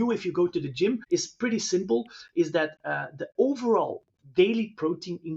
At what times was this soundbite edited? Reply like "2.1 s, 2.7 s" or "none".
1.0 s